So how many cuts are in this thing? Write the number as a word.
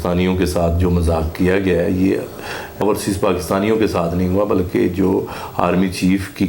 one